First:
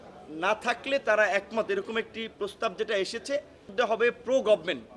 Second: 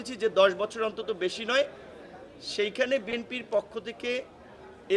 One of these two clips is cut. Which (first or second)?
first